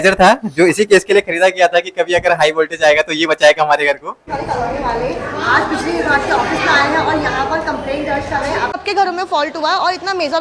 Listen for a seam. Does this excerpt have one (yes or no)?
yes